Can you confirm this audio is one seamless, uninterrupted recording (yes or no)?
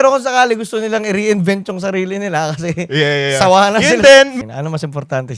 no